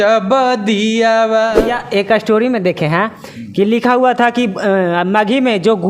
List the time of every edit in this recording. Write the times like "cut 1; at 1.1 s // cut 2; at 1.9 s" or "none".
cut 1; at 1.6 s